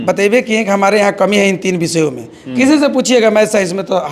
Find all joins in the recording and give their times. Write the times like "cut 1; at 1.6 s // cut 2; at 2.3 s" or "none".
none